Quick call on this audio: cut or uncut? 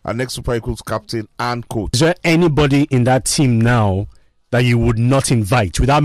cut